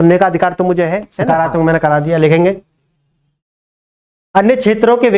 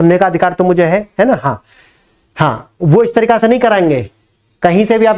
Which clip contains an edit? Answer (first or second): first